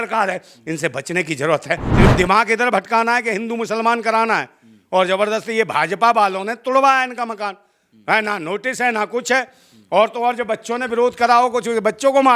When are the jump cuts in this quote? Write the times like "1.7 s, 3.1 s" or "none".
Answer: 1.9 s